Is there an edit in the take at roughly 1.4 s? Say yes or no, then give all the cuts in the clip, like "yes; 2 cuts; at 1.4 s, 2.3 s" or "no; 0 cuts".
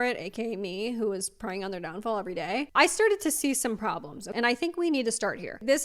no; 2 cuts; at 2.7 s, 4.2 s